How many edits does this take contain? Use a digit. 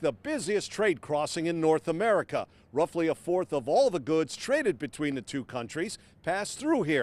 0